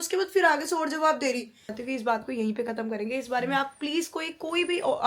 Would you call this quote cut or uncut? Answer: cut